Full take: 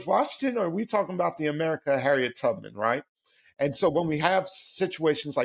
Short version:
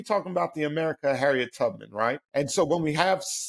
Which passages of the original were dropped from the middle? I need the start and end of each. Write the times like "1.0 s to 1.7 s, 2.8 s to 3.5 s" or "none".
3.1 s to 3.5 s